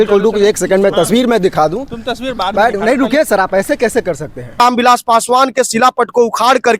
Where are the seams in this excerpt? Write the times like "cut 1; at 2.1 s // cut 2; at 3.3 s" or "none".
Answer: cut 1; at 4.6 s